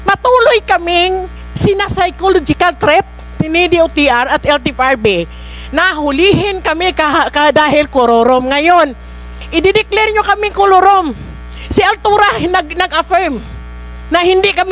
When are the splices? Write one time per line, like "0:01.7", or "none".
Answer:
none